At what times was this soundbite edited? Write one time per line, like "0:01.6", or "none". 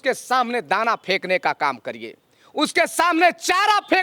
none